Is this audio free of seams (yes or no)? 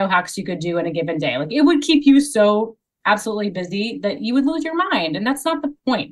yes